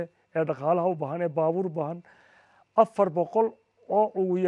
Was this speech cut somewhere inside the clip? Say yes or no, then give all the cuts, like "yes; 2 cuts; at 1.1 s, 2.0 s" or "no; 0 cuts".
no; 0 cuts